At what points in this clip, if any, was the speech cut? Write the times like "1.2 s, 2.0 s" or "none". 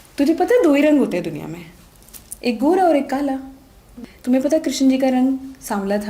4.0 s